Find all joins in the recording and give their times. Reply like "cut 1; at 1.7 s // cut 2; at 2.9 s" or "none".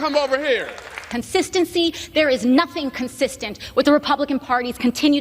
cut 1; at 1.0 s

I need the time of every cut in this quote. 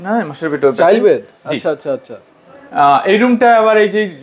none

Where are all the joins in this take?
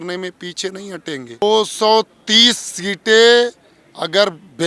cut 1; at 1.4 s

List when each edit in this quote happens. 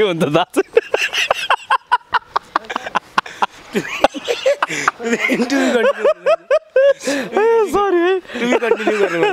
none

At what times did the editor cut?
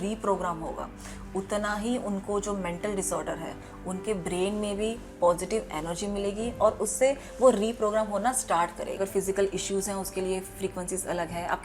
cut 1; at 9.0 s

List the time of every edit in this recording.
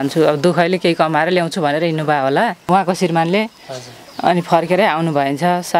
cut 1; at 2.7 s

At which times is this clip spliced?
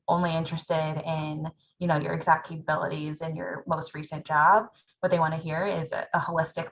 cut 1; at 4.8 s

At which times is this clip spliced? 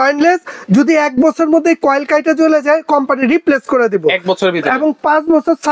none

